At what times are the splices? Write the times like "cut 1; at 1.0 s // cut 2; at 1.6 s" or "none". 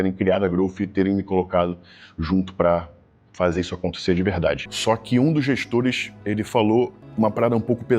cut 1; at 4.7 s